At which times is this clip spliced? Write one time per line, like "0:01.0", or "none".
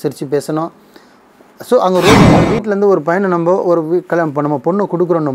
0:02.5